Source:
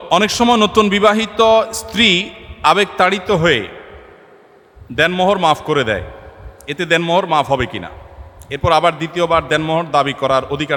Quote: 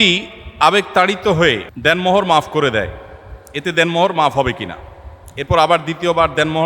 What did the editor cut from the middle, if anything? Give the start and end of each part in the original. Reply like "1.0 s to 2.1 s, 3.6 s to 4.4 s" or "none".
3.7 s to 4.8 s